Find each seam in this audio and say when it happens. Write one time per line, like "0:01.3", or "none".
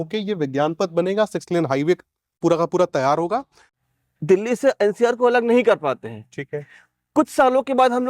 0:03.7

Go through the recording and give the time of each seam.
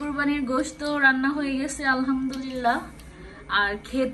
none

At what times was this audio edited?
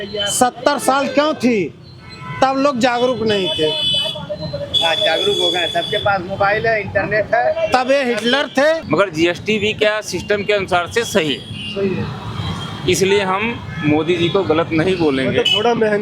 0:08.8

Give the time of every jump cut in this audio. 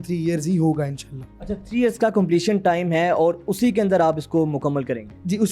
none

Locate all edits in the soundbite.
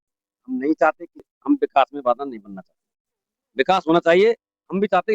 0:01.3

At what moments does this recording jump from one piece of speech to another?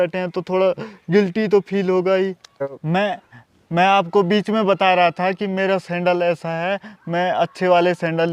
0:02.7

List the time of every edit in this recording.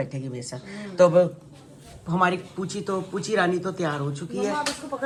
none

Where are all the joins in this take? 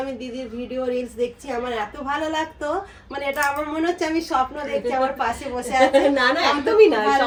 none

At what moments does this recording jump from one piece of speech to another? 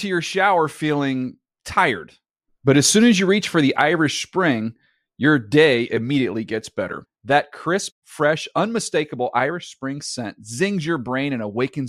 none

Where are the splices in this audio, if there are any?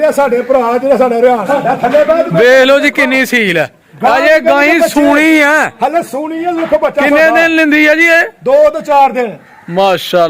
0:01.5

